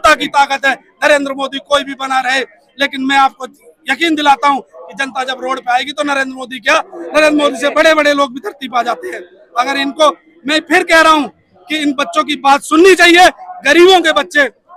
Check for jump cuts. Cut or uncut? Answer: uncut